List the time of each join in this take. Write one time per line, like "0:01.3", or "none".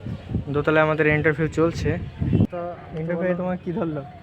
0:02.5